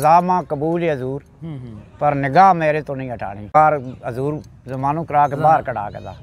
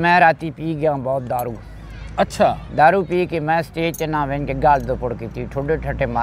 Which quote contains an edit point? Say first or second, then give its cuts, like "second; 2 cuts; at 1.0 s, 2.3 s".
first; 1 cut; at 3.6 s